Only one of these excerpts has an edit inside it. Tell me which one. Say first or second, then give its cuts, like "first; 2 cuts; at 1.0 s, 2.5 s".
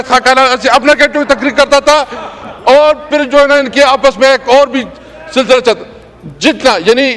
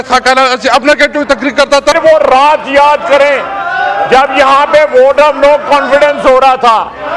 second; 1 cut; at 1.9 s